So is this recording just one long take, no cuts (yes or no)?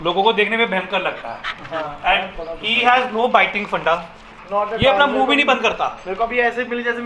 yes